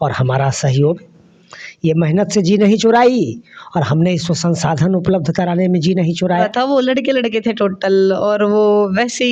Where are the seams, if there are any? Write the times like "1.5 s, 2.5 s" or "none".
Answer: 6.5 s